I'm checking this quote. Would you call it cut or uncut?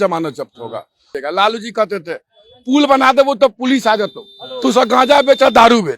cut